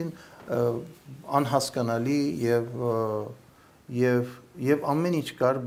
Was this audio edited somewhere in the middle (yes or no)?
no